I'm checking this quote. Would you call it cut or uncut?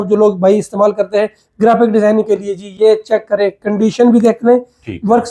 uncut